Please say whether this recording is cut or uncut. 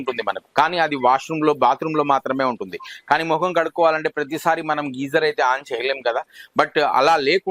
uncut